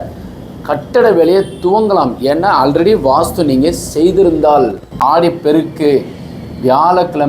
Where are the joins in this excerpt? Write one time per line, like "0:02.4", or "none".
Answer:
0:04.9